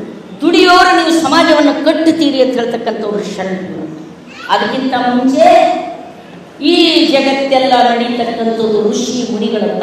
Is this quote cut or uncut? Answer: uncut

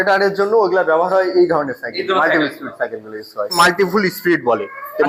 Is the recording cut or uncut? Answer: cut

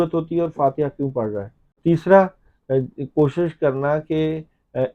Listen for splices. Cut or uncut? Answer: cut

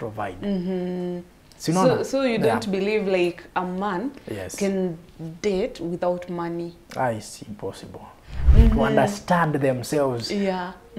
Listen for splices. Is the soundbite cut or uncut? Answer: cut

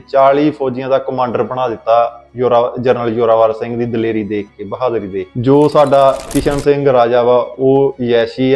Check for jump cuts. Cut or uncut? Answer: cut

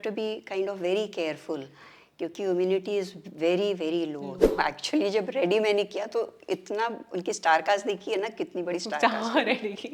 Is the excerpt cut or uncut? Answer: cut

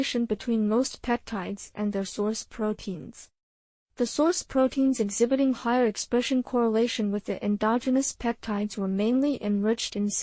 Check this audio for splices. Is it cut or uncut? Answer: cut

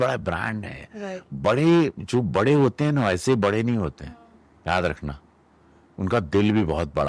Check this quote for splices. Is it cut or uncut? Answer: uncut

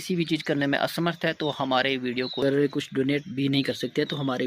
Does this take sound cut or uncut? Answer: cut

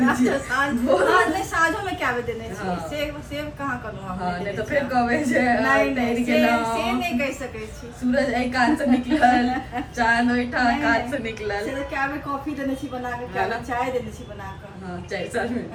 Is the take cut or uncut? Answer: uncut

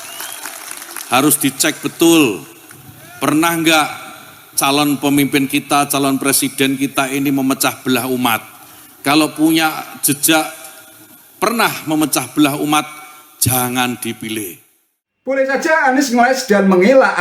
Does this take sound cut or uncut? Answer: cut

